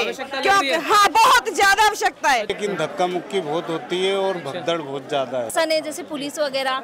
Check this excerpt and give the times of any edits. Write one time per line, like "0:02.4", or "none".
0:02.5
0:05.5